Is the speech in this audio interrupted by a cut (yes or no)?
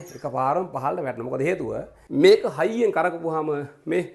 yes